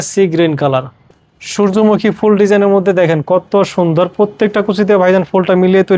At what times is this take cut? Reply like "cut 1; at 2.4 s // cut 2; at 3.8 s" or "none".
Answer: cut 1; at 1.0 s